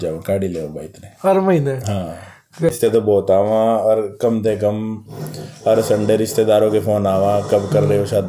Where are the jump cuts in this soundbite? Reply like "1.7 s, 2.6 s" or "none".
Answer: 2.7 s